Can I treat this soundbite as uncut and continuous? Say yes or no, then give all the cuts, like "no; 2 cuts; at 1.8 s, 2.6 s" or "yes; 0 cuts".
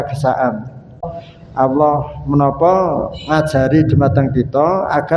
no; 1 cut; at 1.2 s